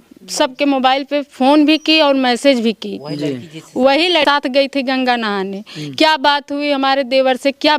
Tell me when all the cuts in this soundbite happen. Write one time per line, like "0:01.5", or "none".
0:04.2